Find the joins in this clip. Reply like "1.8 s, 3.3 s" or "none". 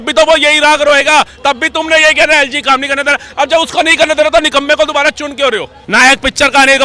5.8 s